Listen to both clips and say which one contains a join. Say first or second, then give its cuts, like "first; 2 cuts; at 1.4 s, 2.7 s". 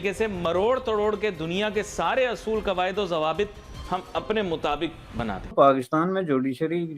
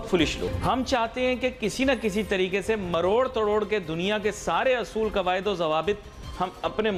first; 1 cut; at 5.4 s